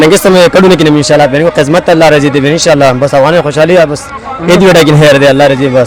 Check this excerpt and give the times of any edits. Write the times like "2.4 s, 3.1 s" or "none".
none